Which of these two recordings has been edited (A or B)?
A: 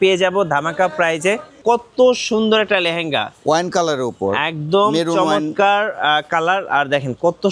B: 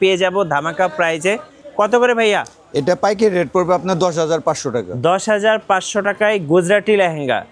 A